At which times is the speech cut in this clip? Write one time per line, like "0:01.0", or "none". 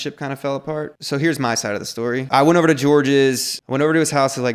0:01.0
0:02.3
0:03.5